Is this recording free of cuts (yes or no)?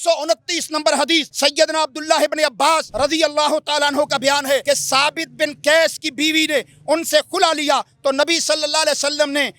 no